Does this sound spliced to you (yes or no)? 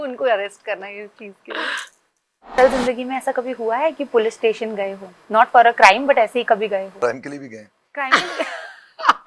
yes